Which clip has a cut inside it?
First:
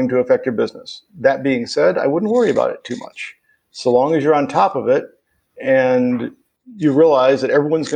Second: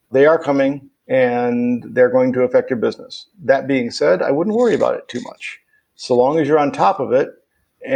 second; 1 cut; at 0.9 s

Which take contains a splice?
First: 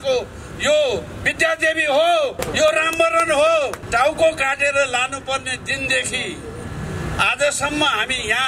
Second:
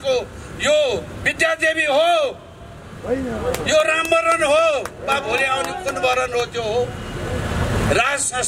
first; 2 cuts; at 2.5 s, 3.8 s

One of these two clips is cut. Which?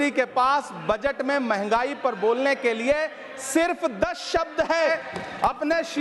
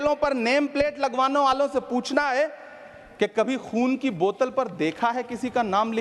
first; 1 cut; at 4.9 s

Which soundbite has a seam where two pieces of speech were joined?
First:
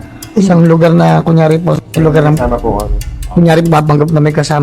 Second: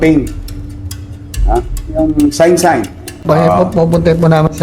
second; 1 cut; at 3.2 s

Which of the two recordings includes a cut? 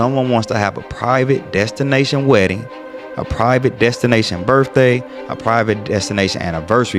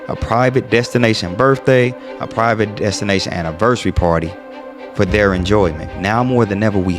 second; 1 cut; at 5.8 s

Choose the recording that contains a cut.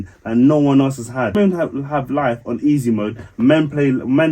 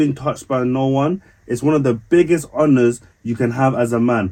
first; 1 cut; at 1.4 s

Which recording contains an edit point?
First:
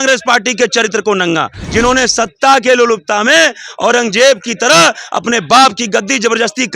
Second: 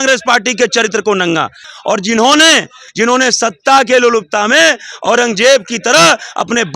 first; 1 cut; at 1.6 s

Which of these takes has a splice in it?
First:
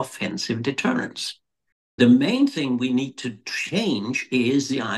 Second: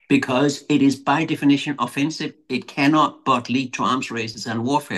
first; 1 cut; at 2.0 s

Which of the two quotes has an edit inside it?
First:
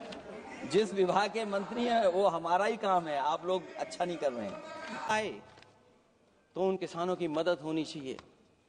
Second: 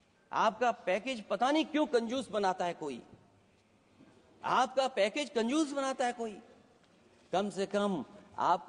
first; 1 cut; at 5.1 s

